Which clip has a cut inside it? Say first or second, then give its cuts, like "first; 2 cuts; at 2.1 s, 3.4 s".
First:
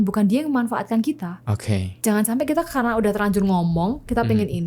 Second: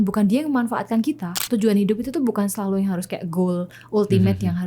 second; 1 cut; at 1.4 s